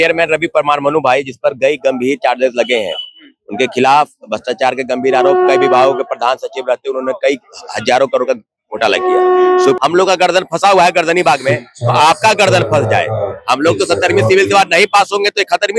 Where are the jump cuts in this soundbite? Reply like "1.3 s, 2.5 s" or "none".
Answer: 9.8 s